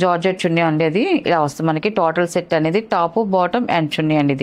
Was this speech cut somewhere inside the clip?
no; 0 cuts

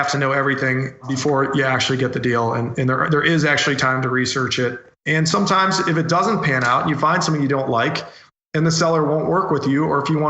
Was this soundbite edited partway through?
yes; 1 cut; at 1.1 s

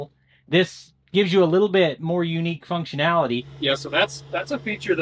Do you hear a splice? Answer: yes; 1 cut; at 3.5 s

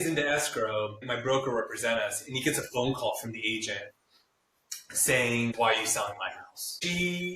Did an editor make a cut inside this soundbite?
yes; 2 cuts; at 1.0 s, 5.5 s

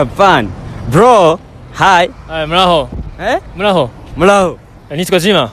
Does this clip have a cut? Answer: no; 0 cuts

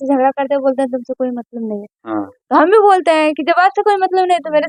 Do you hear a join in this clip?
no; 0 cuts

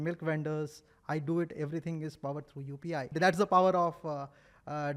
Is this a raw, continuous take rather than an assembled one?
no; 1 cut; at 3.1 s

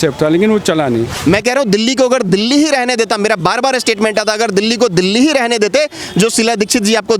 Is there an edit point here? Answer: yes; 1 cut; at 1.1 s

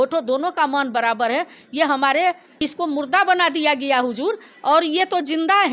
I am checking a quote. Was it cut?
yes; 1 cut; at 2.6 s

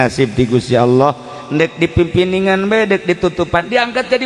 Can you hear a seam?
no; 0 cuts

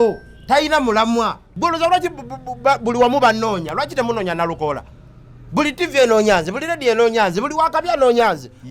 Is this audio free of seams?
no; 1 cut; at 1.5 s

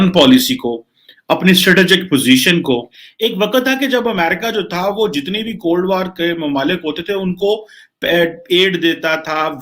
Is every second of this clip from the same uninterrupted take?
no; 1 cut; at 3.0 s

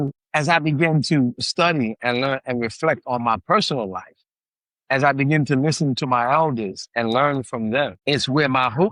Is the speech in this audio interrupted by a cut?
yes; 1 cut; at 8.0 s

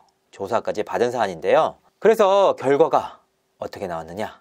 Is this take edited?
yes; 1 cut; at 1.9 s

